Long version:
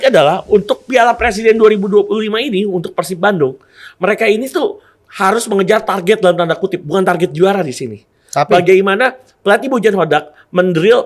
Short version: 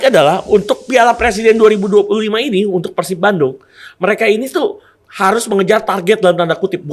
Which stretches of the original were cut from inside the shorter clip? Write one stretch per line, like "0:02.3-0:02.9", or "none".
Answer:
none